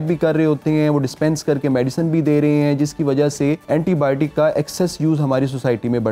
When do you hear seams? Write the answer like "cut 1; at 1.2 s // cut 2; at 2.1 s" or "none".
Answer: cut 1; at 3.6 s